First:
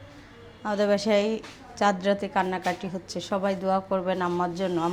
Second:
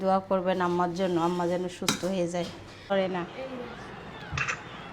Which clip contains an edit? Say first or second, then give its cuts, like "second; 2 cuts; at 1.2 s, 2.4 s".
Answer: second; 1 cut; at 2.9 s